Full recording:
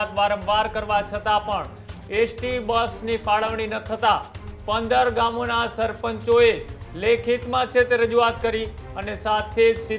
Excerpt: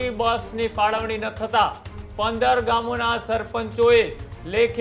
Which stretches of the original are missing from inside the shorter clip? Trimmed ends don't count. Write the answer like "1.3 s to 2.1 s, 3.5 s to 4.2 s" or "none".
none